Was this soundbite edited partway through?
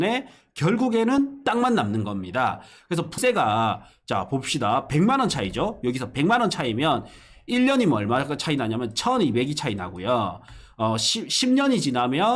yes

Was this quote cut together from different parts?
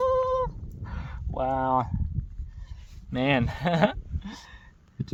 no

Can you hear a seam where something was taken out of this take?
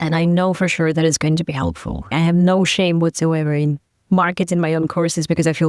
yes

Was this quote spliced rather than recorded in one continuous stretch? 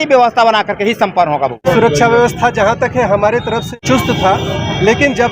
yes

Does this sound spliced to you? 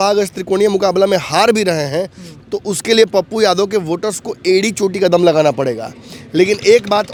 no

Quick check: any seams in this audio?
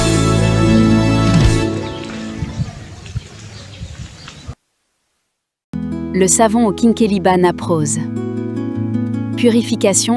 no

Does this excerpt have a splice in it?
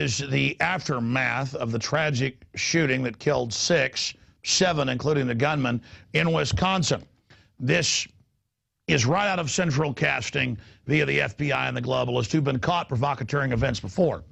no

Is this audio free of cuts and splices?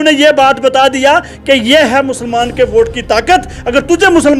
yes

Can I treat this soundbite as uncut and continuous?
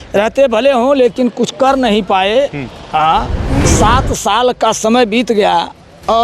no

